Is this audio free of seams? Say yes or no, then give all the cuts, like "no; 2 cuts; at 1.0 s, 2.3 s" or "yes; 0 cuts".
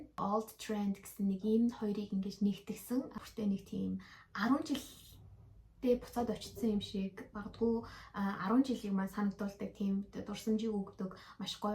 no; 1 cut; at 3.2 s